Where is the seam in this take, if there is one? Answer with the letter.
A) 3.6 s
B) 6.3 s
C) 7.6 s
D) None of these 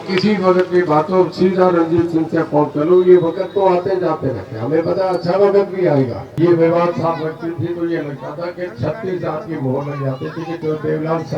B